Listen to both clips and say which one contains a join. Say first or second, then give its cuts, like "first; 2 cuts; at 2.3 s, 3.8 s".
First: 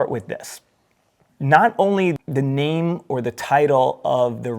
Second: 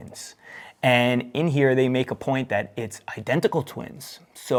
first; 1 cut; at 2.2 s